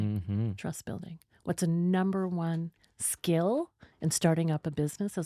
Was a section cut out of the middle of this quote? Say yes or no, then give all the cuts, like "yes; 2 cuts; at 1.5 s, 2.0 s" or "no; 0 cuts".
no; 0 cuts